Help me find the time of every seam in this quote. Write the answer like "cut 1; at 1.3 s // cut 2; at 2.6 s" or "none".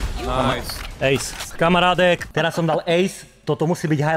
cut 1; at 1.4 s // cut 2; at 2.3 s